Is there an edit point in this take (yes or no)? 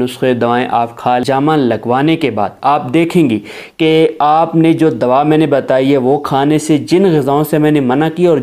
yes